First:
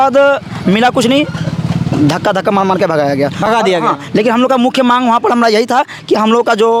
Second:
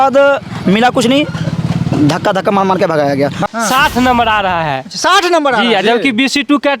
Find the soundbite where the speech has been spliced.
second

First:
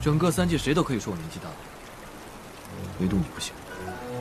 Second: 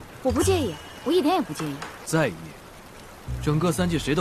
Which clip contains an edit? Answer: second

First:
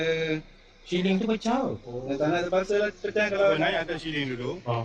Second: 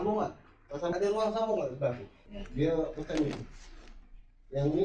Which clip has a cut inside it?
second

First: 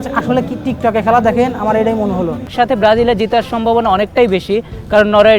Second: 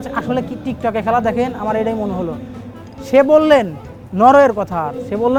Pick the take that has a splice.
first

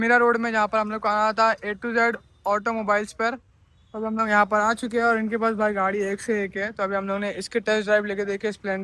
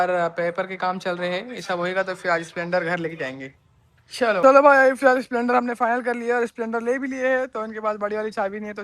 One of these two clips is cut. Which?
second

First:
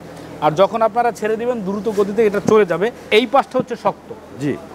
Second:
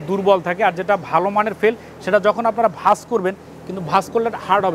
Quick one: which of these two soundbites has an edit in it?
first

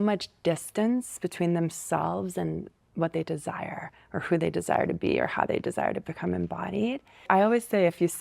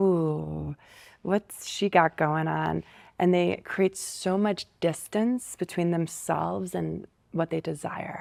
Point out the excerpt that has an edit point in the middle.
first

